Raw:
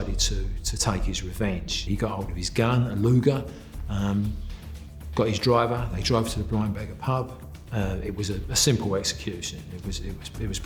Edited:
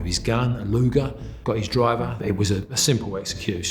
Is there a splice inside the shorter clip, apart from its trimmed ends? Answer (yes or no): yes